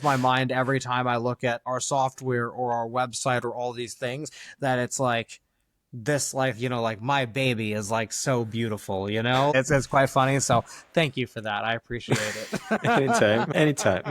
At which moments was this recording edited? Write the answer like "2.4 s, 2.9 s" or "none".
1.6 s, 9.5 s